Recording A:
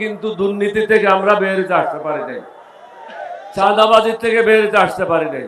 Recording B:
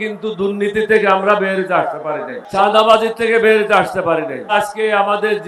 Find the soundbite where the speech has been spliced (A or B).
B